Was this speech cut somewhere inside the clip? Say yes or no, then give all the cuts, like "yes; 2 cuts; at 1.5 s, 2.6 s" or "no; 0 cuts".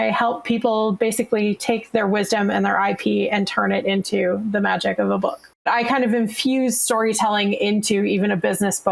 yes; 1 cut; at 5.6 s